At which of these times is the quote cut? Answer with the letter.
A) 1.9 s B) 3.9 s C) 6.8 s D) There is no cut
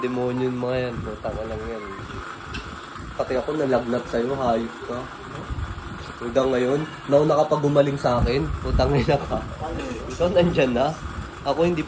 A